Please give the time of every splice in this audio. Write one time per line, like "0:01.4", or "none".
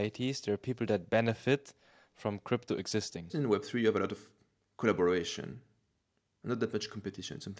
0:03.3